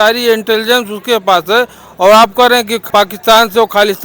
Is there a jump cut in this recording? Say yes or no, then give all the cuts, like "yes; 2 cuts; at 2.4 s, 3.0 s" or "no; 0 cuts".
yes; 1 cut; at 2.8 s